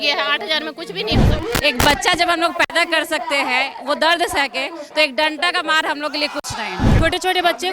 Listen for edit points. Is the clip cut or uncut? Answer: cut